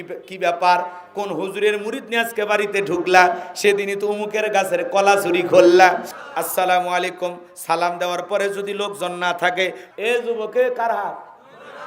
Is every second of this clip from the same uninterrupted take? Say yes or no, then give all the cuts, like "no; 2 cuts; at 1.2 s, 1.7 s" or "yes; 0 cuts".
no; 2 cuts; at 6.1 s, 9.8 s